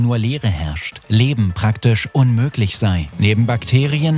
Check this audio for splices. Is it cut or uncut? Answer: cut